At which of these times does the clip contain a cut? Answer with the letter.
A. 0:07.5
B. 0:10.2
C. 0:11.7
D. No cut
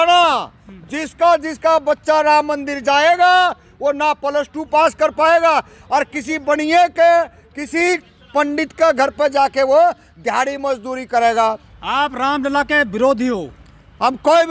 C